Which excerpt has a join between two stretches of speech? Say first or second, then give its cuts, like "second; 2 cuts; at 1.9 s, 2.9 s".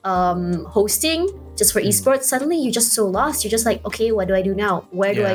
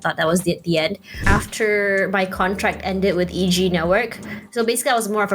second; 1 cut; at 1.1 s